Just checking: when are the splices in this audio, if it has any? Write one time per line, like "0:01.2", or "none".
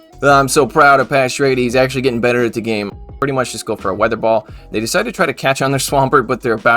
0:03.0